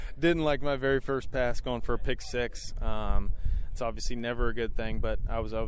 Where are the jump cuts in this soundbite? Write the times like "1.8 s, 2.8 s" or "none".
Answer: none